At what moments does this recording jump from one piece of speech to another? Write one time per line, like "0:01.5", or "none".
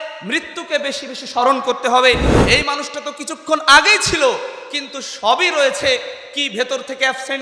0:02.3